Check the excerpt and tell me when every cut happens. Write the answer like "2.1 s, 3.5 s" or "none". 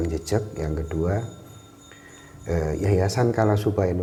none